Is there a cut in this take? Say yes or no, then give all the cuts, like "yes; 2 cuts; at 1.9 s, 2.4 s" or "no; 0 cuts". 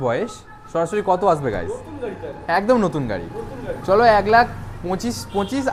no; 0 cuts